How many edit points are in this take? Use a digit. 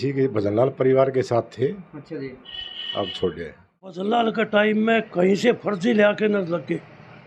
1